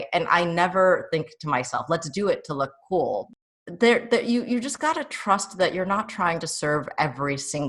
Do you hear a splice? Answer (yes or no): yes